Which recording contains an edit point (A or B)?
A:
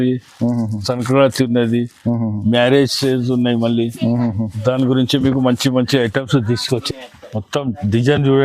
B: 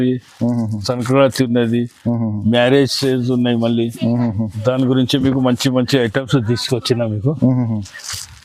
A